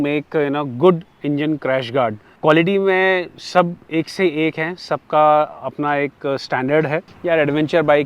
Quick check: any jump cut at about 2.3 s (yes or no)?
yes